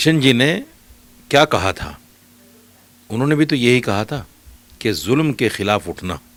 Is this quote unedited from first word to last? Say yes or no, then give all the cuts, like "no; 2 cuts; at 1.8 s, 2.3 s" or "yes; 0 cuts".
yes; 0 cuts